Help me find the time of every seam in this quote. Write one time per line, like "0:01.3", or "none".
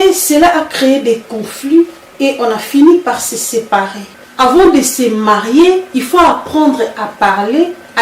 0:04.1

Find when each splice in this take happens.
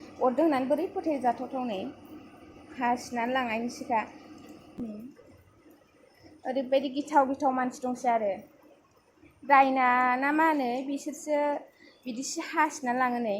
0:04.6

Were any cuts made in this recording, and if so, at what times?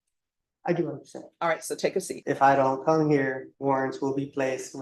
0:02.1
0:03.5

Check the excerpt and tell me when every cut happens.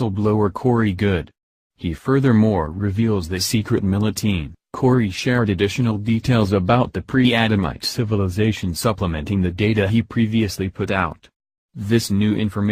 none

